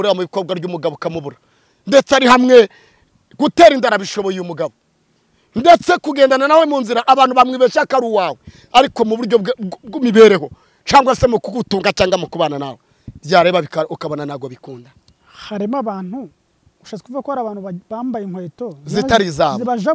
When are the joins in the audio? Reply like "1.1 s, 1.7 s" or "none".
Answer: none